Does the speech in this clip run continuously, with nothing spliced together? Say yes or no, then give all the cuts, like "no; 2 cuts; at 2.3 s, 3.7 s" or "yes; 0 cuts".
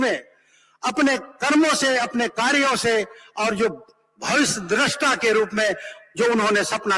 yes; 0 cuts